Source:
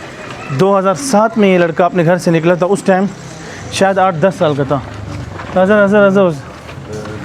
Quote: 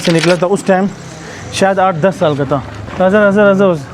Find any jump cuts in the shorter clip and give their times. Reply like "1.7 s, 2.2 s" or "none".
2.8 s